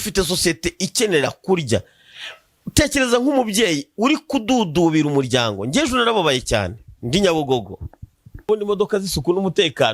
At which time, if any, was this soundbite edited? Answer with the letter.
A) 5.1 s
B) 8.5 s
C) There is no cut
B